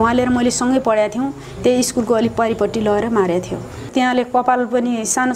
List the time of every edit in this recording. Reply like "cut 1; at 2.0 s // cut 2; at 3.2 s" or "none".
cut 1; at 3.8 s